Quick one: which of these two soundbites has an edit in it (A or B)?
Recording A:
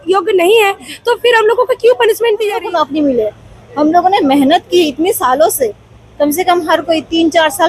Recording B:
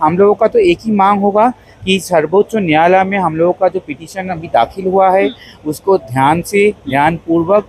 A